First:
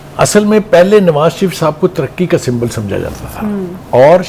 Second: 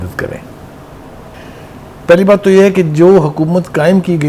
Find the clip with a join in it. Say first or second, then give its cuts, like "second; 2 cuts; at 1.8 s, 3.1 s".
second; 1 cut; at 1.3 s